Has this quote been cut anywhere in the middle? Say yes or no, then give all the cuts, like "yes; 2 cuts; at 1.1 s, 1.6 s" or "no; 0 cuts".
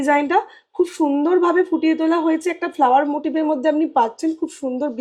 no; 0 cuts